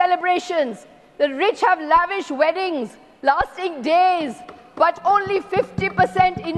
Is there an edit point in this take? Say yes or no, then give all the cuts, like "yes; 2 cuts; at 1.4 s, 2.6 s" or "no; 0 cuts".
no; 0 cuts